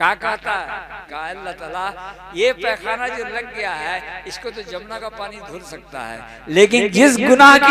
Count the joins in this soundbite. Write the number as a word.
one